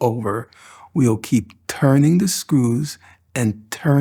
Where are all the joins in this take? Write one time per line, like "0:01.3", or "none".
none